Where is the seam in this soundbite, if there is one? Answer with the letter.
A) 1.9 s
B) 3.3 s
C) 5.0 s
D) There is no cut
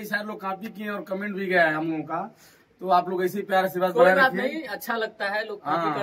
D